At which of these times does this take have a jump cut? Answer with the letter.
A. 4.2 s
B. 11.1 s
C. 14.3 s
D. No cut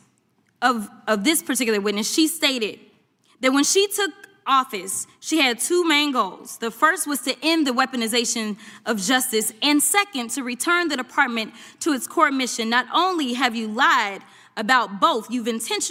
D